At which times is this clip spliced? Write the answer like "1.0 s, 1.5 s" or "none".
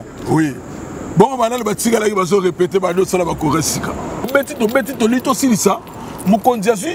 4.3 s